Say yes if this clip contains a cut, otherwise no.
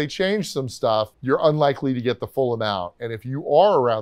yes